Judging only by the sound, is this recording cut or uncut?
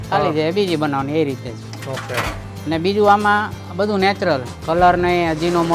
cut